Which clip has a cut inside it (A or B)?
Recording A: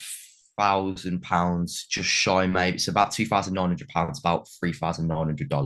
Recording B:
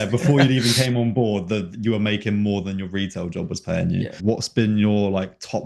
B